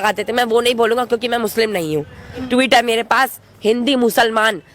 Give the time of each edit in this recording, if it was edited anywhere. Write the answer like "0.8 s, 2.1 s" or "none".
2.5 s